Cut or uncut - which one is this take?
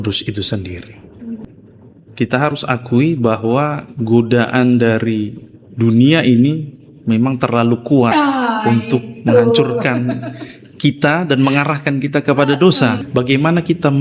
cut